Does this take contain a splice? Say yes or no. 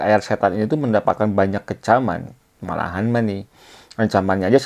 no